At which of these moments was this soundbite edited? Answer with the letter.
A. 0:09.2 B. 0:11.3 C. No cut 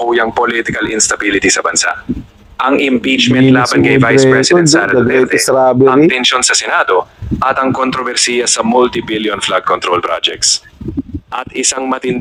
C